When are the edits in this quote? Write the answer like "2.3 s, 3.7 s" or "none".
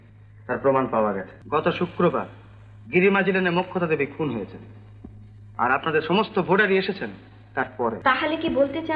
1.3 s, 8.0 s